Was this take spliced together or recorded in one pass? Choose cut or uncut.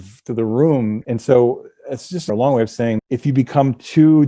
cut